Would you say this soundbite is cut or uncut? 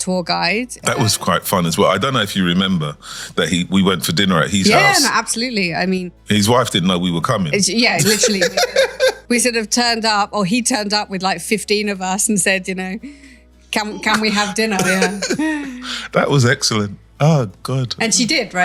uncut